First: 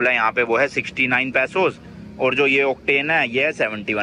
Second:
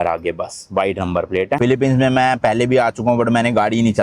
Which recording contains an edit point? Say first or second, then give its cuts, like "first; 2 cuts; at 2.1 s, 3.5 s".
second; 1 cut; at 1.6 s